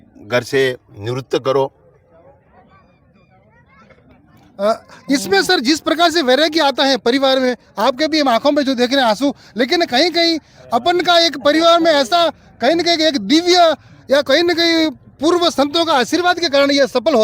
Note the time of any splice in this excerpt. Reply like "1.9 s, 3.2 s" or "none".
none